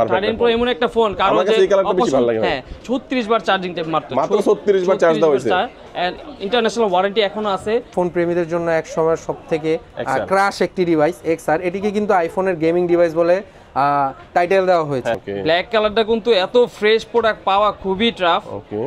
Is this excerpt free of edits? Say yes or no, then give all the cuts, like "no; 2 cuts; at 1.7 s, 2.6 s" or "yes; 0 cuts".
no; 3 cuts; at 2.8 s, 7.9 s, 15.3 s